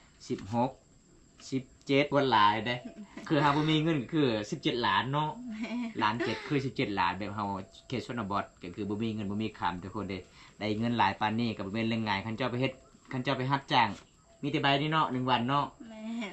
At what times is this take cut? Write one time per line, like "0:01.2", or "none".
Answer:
0:02.1